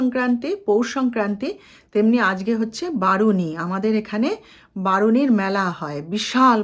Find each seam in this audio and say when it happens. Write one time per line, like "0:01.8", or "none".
none

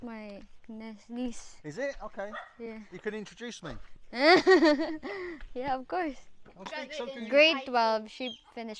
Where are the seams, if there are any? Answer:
0:06.8

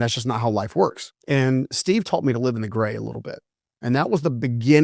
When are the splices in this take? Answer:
0:01.1

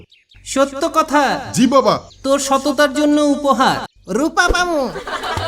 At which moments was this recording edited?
0:02.1
0:03.9

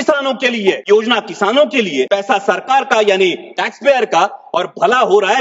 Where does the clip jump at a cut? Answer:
0:00.8
0:02.1

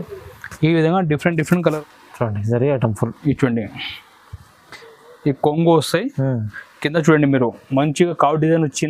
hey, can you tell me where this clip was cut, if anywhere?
0:01.8

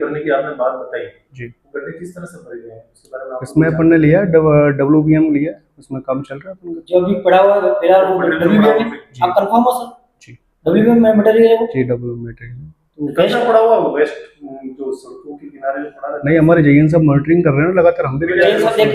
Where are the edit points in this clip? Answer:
none

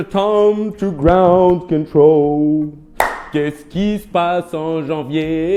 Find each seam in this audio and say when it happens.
none

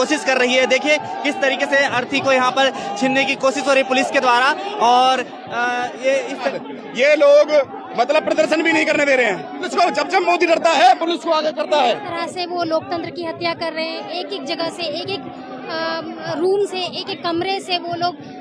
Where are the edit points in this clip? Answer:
0:06.6
0:09.6
0:11.9

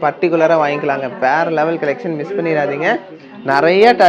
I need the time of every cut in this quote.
0:03.2

